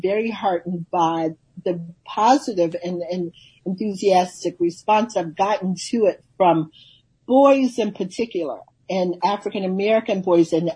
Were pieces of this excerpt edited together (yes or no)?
yes